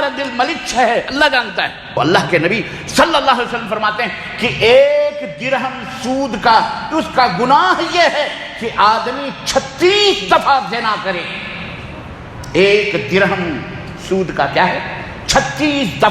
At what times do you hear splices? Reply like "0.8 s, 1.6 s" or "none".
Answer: 2.0 s